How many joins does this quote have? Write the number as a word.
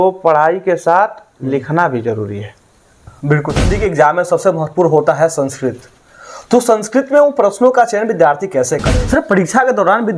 two